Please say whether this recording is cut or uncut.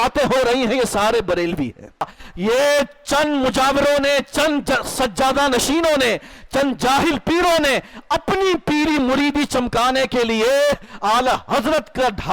cut